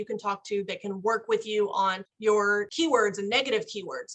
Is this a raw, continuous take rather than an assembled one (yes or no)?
no